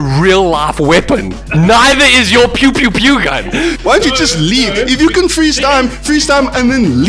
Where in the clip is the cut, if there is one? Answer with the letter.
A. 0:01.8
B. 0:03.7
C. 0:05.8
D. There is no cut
B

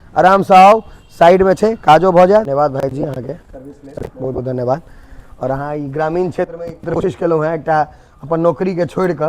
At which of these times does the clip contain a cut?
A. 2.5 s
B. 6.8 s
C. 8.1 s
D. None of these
A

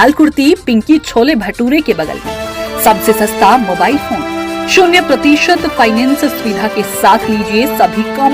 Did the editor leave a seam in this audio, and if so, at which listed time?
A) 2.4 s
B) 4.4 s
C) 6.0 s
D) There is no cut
D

